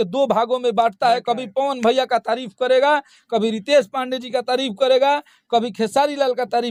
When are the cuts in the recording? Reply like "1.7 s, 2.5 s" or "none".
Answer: none